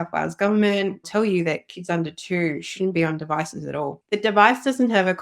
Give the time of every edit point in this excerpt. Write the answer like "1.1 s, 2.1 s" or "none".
1.0 s, 4.0 s